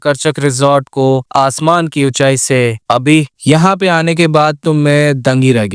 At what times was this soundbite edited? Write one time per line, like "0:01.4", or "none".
0:03.3